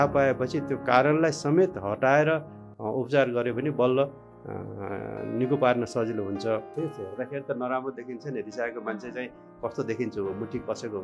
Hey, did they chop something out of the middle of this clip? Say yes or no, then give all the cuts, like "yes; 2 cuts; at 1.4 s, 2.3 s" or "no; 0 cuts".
yes; 1 cut; at 6.7 s